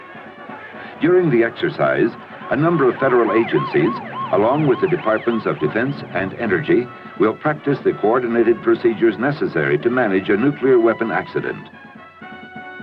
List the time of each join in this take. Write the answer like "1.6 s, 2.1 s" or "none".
2.3 s

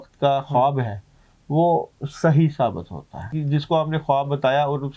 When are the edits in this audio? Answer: 3.3 s

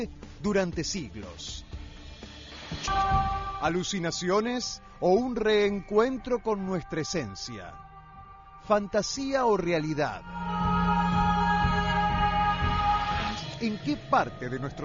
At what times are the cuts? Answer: 2.9 s, 13.4 s

